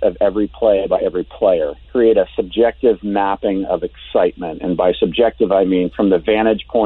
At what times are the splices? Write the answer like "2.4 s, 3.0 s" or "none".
1.8 s